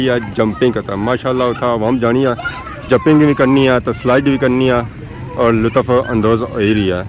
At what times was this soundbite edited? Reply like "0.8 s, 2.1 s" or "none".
none